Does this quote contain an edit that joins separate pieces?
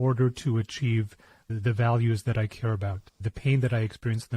yes; 2 cuts; at 1.5 s, 3.1 s

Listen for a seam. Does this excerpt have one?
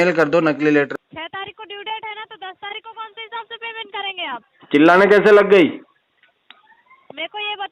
yes; 1 cut; at 0.9 s

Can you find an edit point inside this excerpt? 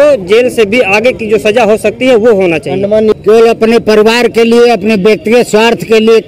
yes; 1 cut; at 3.2 s

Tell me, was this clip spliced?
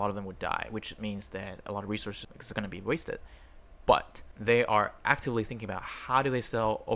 no; 0 cuts

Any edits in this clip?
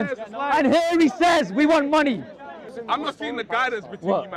yes; 1 cut; at 2.7 s

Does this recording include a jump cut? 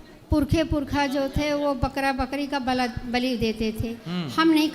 no; 0 cuts

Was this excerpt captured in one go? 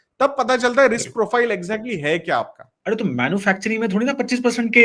no; 1 cut; at 2.6 s

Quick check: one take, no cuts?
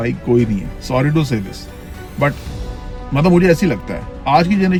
yes; 0 cuts

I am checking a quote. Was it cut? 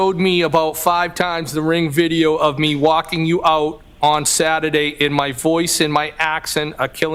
no; 0 cuts

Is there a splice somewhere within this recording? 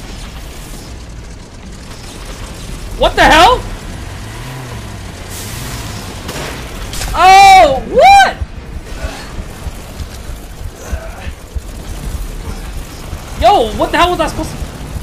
no; 0 cuts

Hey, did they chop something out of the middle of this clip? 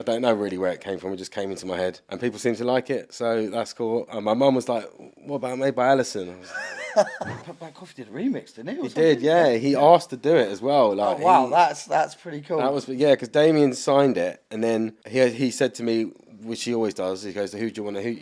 yes; 3 cuts; at 2.1 s, 7.4 s, 13.3 s

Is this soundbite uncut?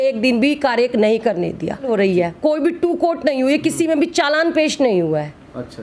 no; 1 cut; at 1.8 s

